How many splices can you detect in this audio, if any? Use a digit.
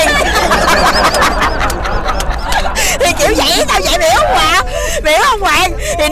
0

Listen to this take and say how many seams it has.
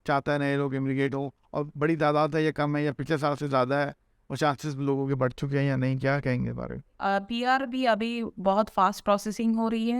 1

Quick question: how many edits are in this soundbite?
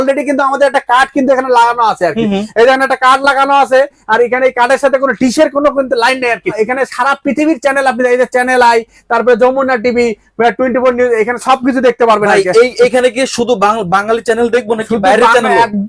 1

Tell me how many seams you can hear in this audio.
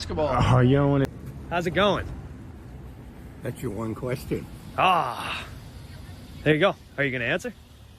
1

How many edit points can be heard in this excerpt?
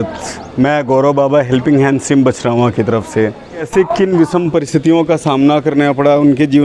1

